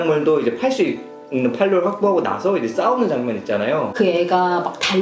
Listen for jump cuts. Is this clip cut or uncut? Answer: cut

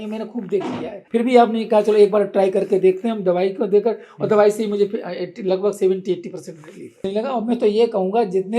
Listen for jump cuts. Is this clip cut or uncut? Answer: cut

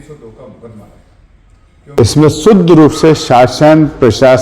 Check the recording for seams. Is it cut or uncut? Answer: cut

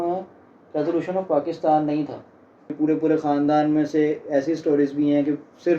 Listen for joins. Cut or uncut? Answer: cut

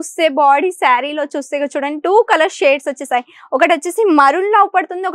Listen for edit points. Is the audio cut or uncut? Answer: uncut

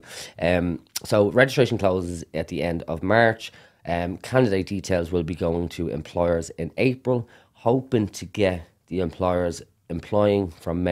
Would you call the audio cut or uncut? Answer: uncut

